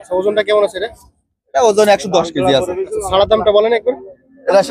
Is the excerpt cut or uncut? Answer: uncut